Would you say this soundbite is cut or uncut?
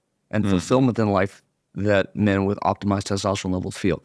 uncut